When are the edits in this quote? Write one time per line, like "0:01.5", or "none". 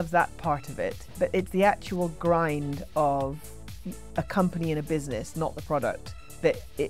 0:01.0